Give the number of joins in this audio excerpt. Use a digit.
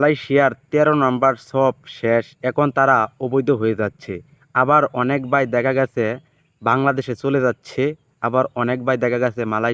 0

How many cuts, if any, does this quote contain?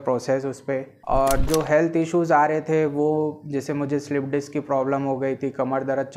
1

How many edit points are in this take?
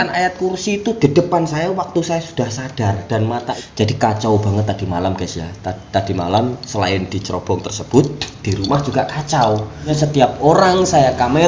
2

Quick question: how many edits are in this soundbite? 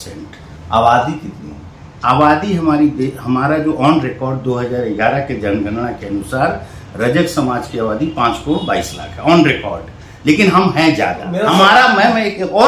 1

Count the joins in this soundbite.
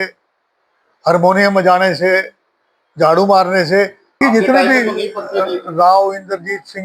1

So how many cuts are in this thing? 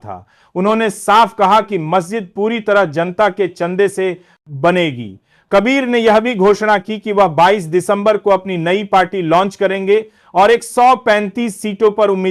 0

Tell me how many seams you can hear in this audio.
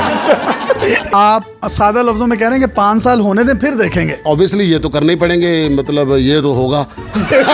1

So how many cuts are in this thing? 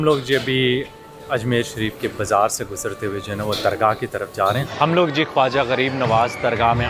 1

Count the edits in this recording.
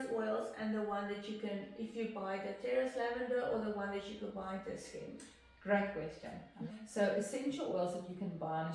1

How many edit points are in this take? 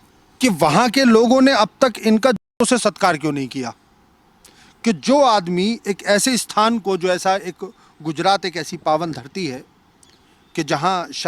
0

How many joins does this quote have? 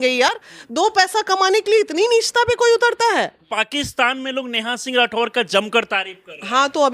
1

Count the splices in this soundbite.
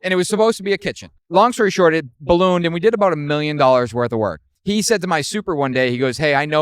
2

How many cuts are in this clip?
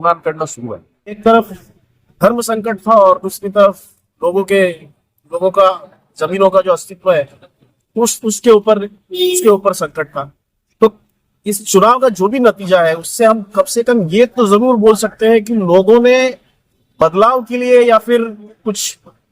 1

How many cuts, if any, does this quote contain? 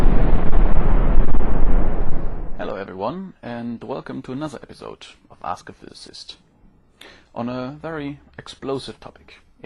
1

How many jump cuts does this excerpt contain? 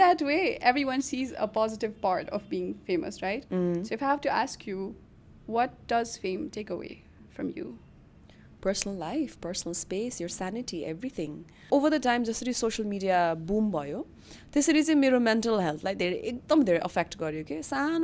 1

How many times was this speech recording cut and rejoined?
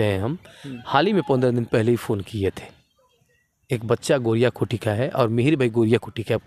0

